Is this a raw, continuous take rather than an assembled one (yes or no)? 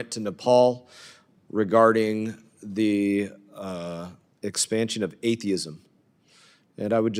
yes